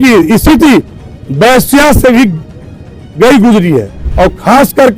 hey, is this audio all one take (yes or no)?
no